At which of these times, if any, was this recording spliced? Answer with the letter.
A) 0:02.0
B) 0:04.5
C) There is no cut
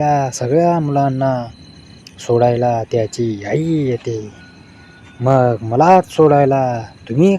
C